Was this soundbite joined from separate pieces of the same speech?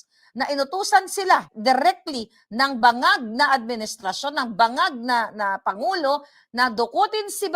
yes; 1 cut; at 1.5 s

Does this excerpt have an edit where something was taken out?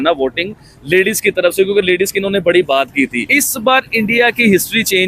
yes; 1 cut; at 3.2 s

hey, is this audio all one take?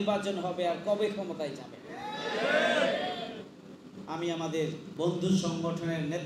no; 1 cut; at 4.9 s

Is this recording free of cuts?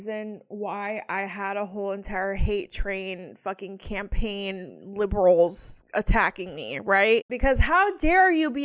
yes; 0 cuts

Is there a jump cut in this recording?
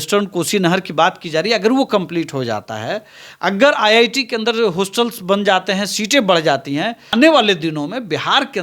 yes; 1 cut; at 7.1 s

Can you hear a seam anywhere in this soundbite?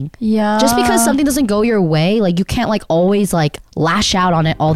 no; 0 cuts

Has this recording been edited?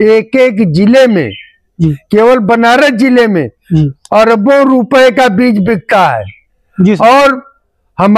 no; 0 cuts

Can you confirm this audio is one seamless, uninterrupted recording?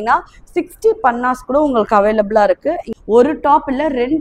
no; 1 cut; at 2.9 s

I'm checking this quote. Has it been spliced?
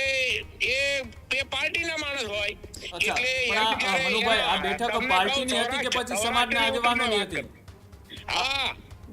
no; 0 cuts

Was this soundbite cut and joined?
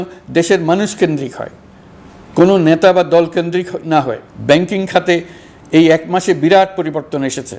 yes; 1 cut; at 4.3 s

